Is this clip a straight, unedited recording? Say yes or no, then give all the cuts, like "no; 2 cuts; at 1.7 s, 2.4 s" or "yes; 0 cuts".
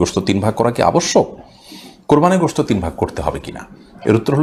yes; 0 cuts